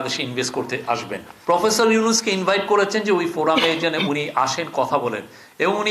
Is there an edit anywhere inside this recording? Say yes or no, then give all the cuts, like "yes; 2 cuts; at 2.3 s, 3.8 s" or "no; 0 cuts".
yes; 1 cut; at 1.3 s